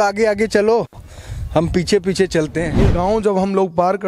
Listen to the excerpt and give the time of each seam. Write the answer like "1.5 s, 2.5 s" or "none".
2.8 s